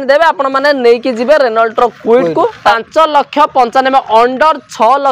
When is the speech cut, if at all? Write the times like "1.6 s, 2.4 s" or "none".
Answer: 2.7 s